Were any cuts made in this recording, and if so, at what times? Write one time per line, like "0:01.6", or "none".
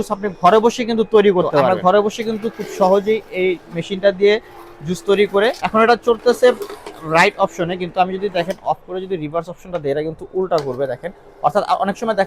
0:01.7
0:05.6

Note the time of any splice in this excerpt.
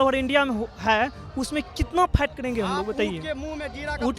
none

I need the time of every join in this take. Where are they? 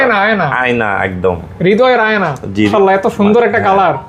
0:02.7

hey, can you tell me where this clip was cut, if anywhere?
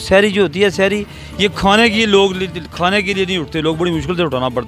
none

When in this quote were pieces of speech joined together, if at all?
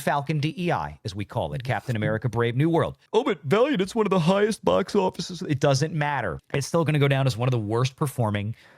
0:03.0
0:06.4

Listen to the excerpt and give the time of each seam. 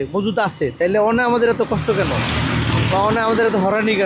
none

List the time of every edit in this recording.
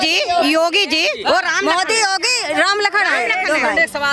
none

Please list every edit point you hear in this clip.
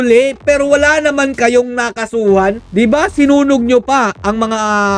0:02.6

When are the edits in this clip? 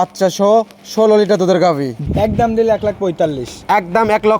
0:02.0

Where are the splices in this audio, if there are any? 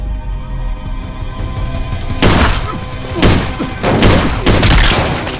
0:02.8

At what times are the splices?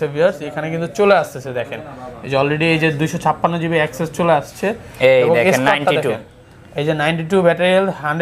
none

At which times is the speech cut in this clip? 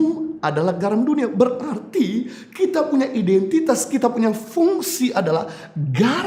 none

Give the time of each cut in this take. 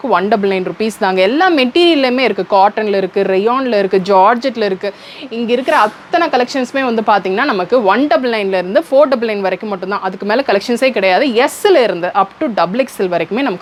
none

